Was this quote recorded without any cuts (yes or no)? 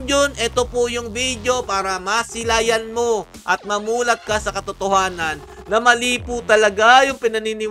yes